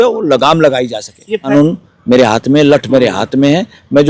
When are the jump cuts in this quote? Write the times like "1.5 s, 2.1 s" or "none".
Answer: 1.4 s